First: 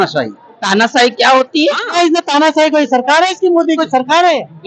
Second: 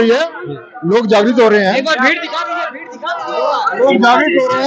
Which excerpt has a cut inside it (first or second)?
first